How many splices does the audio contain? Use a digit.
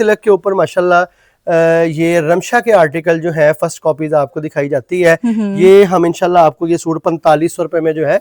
0